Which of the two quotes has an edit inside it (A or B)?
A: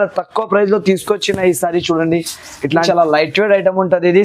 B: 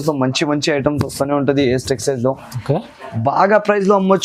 A